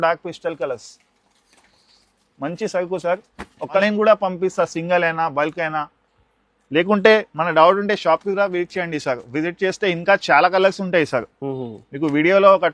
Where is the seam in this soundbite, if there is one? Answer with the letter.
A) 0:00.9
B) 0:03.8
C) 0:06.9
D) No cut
B